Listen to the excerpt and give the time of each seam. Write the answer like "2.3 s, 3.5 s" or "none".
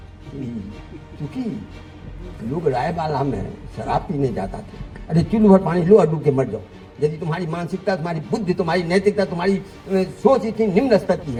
none